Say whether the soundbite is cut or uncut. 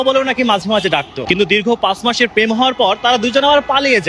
cut